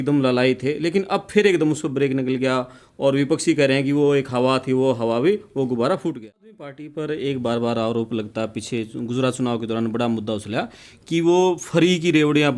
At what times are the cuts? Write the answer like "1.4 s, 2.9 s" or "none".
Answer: 6.8 s